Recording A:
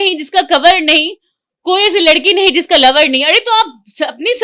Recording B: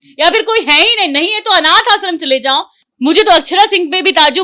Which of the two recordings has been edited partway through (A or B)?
B